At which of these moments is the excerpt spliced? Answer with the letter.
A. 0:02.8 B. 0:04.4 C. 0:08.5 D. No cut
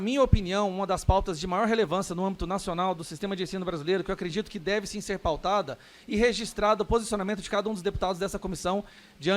D